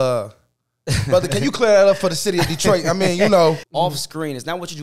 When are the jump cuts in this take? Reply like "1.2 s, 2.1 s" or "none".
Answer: 3.6 s